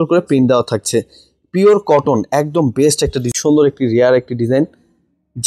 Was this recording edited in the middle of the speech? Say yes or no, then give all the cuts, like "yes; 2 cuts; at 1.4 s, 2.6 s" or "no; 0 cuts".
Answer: yes; 1 cut; at 3.3 s